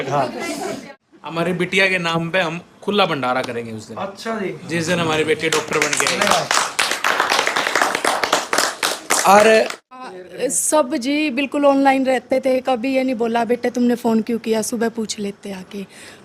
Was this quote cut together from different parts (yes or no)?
yes